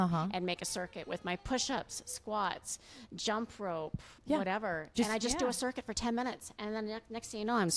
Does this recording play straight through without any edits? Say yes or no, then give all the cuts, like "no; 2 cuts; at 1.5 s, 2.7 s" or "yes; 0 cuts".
yes; 0 cuts